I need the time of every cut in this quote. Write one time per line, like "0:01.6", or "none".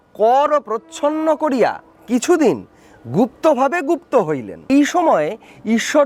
0:04.6

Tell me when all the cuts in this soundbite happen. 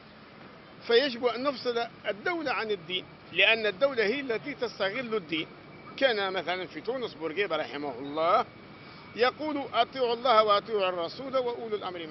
none

